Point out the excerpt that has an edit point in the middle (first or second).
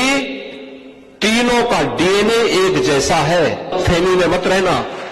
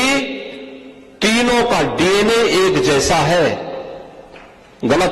first